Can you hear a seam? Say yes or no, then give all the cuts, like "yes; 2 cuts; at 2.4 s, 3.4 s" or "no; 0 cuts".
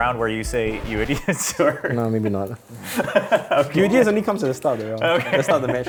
no; 0 cuts